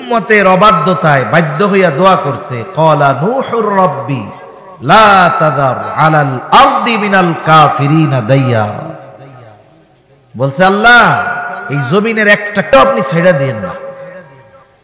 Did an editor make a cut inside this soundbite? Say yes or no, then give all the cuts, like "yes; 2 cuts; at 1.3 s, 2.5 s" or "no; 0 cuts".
yes; 1 cut; at 12.7 s